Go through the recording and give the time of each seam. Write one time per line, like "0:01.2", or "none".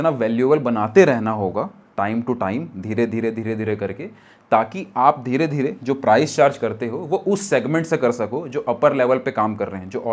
none